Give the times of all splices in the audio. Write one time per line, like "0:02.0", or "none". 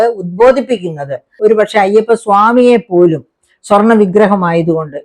0:01.3